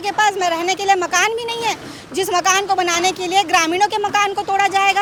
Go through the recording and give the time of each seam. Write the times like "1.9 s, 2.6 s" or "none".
none